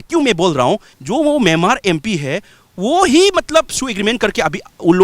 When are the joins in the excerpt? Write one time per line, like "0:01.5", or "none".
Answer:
0:00.9